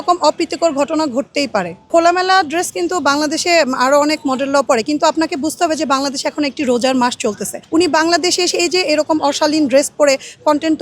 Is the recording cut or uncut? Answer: cut